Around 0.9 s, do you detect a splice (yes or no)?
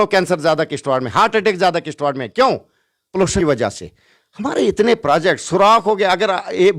no